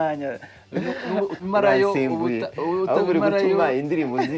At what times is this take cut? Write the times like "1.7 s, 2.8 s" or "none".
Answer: 1.3 s